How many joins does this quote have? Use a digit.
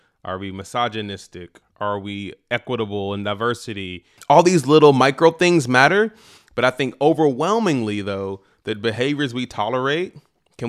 1